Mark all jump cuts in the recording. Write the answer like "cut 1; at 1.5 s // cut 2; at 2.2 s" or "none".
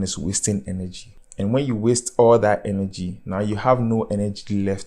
cut 1; at 1.0 s